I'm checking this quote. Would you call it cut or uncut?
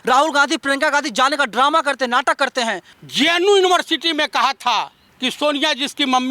cut